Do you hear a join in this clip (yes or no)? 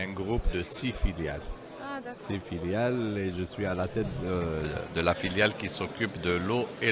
no